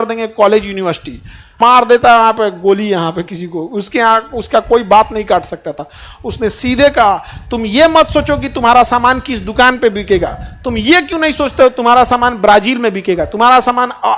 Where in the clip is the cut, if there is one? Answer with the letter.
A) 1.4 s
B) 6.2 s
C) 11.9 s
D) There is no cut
A